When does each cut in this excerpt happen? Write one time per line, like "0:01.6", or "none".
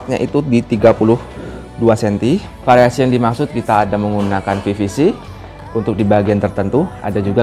0:02.5